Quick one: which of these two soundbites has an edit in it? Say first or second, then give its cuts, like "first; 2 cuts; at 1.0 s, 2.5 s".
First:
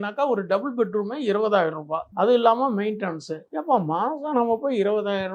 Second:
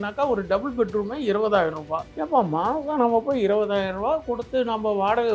second; 1 cut; at 2.0 s